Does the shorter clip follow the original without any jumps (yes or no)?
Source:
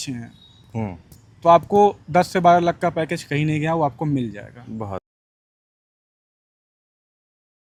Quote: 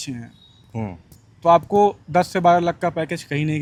yes